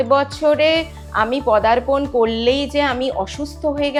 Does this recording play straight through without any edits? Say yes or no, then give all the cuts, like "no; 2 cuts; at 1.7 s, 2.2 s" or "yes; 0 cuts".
yes; 0 cuts